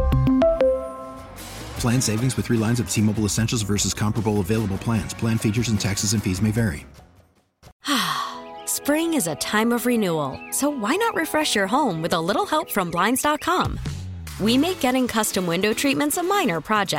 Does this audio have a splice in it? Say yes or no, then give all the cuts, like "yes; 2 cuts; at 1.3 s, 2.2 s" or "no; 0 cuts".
no; 0 cuts